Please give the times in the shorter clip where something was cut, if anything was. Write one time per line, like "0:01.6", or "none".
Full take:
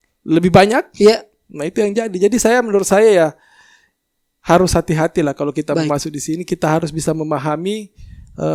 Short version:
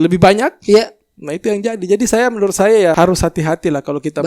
0:02.9